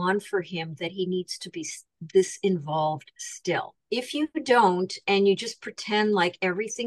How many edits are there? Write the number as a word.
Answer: one